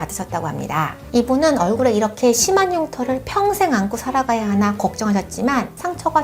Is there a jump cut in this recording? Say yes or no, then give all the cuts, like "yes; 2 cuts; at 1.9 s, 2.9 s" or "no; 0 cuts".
yes; 1 cut; at 1.0 s